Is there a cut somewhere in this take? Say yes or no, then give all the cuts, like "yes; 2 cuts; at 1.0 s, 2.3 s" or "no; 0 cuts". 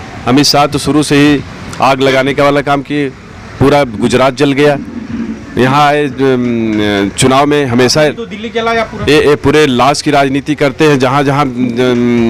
no; 0 cuts